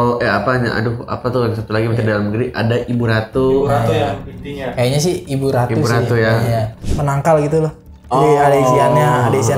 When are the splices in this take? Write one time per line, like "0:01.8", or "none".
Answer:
0:06.8